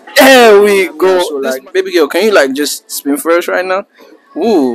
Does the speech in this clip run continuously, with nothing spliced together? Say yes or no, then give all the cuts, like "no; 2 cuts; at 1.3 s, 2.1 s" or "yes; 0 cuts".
no; 1 cut; at 1.3 s